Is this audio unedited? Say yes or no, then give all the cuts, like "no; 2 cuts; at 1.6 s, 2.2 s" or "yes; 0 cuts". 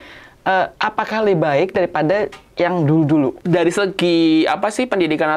no; 1 cut; at 3.4 s